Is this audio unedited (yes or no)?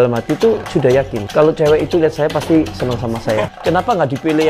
no